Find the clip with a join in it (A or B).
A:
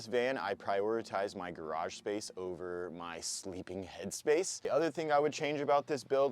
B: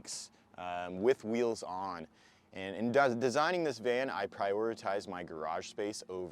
A